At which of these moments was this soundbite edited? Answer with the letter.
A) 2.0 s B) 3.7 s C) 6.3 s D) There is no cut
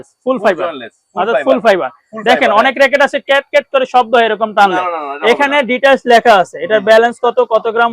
D